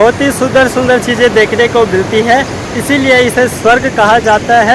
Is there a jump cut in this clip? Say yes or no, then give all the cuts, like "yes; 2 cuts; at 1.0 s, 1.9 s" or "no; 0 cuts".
no; 0 cuts